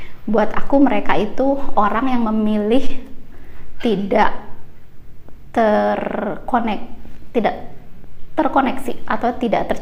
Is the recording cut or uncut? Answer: uncut